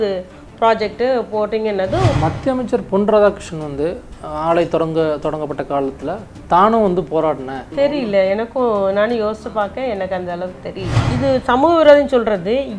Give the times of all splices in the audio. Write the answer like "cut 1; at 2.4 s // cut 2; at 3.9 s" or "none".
cut 1; at 2.1 s // cut 2; at 7.7 s // cut 3; at 11.0 s